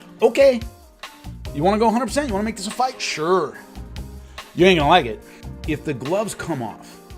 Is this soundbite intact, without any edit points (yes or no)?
no